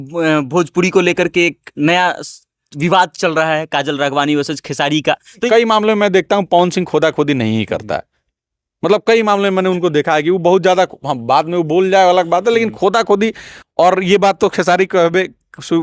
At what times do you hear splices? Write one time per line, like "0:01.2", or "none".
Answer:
0:05.4